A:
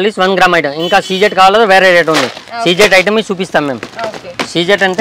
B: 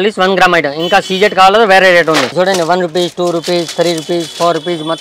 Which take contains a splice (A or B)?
B